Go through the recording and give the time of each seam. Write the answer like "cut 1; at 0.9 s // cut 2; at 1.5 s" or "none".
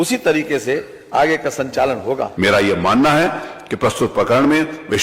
cut 1; at 2.3 s

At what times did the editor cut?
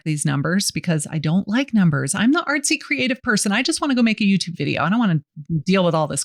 none

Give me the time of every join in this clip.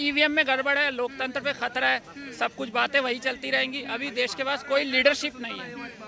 none

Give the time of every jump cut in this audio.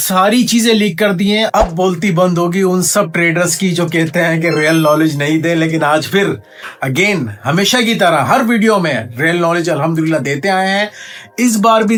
none

